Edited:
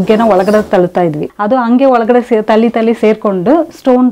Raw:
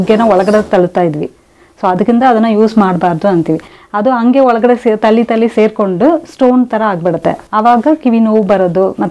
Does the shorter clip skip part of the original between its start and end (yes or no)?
yes